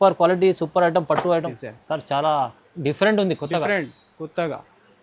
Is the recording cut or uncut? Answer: cut